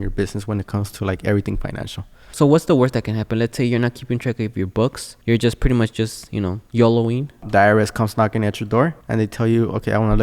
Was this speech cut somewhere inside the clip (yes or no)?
yes